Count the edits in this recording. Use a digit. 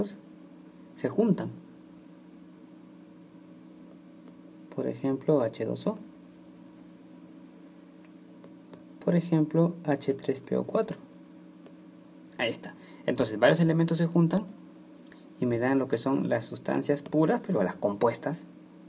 1